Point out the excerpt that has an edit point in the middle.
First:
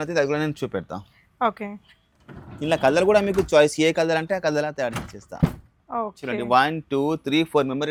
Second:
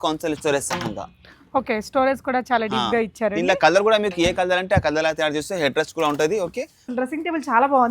second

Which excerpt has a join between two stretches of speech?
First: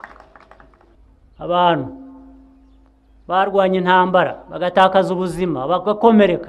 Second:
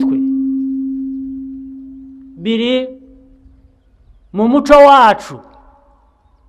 first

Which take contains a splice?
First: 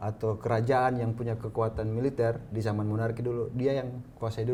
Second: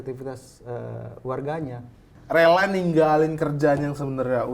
second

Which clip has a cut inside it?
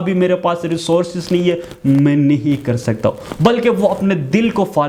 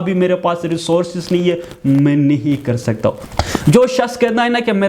second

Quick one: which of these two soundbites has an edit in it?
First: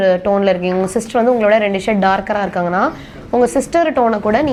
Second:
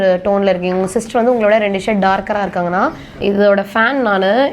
second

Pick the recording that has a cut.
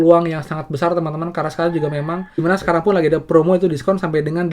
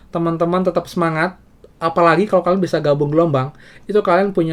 first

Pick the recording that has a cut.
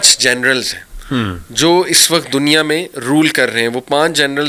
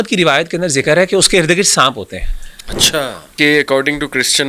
second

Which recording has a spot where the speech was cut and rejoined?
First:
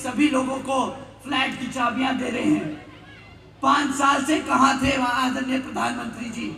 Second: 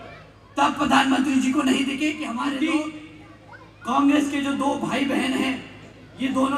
second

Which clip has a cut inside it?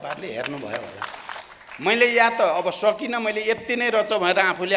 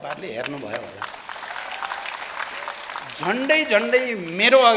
first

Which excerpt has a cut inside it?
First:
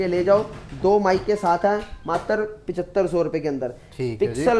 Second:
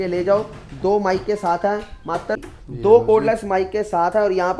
second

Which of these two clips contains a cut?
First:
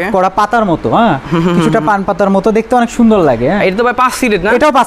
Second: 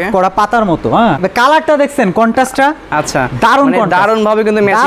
second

